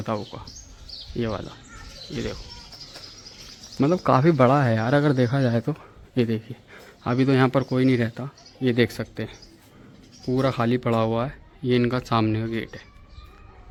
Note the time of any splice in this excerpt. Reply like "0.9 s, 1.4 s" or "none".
none